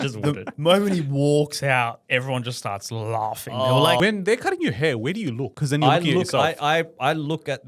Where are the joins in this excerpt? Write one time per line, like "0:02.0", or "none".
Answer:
0:04.0
0:05.5